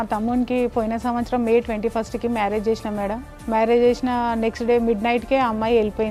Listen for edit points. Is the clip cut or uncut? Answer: uncut